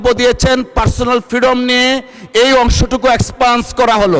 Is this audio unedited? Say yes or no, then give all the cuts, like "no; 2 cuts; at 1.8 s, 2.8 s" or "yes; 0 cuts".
yes; 0 cuts